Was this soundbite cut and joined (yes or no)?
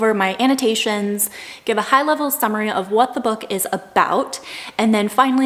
no